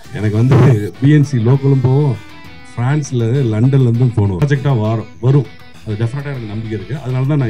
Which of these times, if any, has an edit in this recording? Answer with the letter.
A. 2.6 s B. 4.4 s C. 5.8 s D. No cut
B